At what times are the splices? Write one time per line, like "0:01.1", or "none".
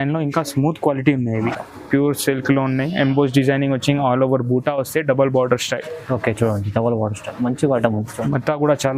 0:01.5